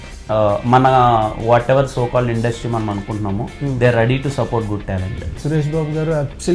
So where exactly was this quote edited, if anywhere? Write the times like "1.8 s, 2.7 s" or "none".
5.4 s